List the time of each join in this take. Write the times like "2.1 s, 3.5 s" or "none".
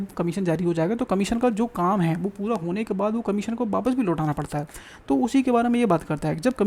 none